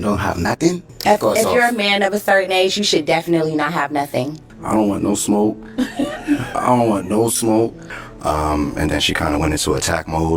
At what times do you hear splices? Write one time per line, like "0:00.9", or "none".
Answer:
0:00.9
0:04.5
0:07.9